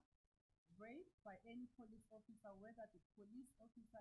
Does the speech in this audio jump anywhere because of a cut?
no; 0 cuts

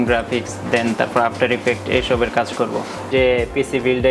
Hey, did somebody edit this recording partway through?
yes; 1 cut; at 3.1 s

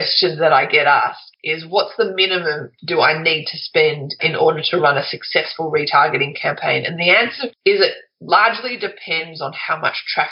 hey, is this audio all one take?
no; 1 cut; at 4.2 s

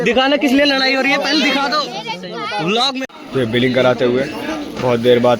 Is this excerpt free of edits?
no; 1 cut; at 3.1 s

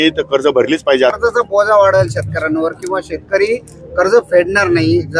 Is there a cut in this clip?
yes; 1 cut; at 1.2 s

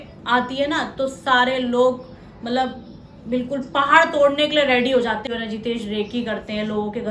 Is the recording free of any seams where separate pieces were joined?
no; 1 cut; at 5.2 s

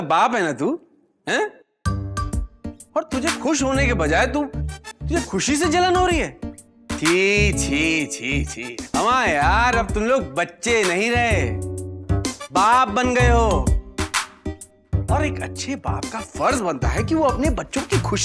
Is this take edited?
no; 0 cuts

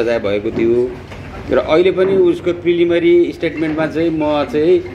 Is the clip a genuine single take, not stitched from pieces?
yes; 0 cuts

